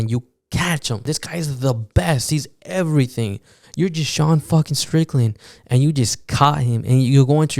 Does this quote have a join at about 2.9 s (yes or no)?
no